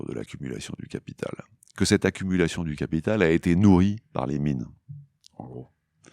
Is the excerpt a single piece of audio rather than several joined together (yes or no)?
yes